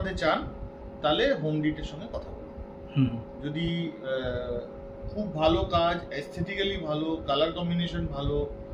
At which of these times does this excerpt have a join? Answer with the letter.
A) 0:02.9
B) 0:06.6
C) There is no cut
C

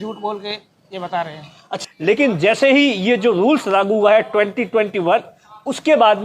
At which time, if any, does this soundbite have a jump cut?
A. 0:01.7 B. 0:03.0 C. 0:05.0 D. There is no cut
A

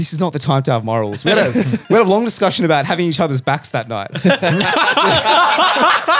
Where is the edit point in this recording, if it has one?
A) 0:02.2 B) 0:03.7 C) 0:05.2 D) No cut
D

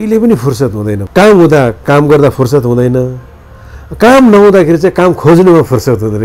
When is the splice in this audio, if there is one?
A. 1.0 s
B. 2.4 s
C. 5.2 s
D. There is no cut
A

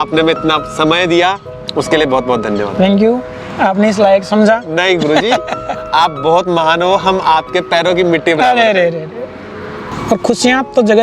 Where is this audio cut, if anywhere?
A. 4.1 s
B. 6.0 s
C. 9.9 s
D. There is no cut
C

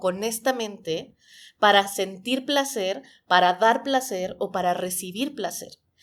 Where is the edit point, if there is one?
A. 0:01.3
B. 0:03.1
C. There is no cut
C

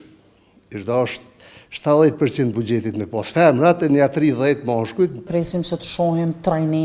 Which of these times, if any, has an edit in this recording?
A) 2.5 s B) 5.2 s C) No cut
B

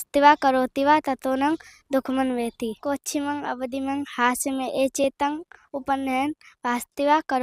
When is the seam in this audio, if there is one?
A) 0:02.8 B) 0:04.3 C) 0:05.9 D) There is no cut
A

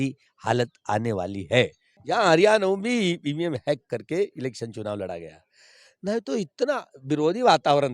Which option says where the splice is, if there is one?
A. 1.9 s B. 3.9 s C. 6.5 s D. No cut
A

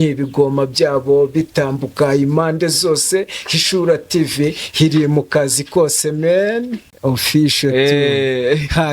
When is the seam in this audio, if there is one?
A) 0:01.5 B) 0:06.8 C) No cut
B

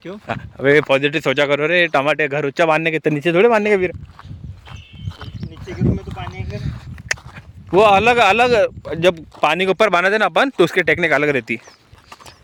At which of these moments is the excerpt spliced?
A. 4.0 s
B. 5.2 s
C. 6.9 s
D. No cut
D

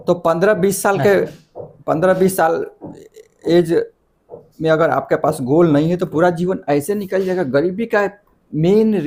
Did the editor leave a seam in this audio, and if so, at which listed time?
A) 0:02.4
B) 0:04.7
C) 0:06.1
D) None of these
D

